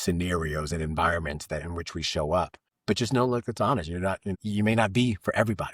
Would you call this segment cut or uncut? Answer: cut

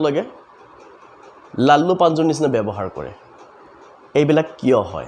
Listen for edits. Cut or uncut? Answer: uncut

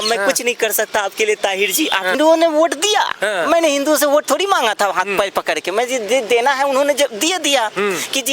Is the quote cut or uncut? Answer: cut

